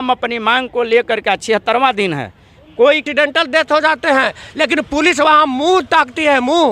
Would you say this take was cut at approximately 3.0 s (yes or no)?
yes